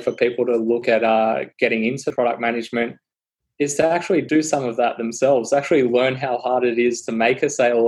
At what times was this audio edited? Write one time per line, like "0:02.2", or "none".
0:00.8
0:02.1
0:04.2